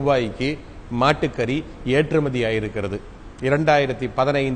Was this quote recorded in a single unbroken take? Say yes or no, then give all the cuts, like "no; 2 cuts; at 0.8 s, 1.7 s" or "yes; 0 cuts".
yes; 0 cuts